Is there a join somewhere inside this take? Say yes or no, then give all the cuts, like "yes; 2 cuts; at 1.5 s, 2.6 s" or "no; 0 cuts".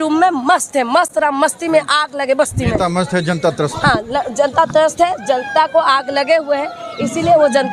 no; 0 cuts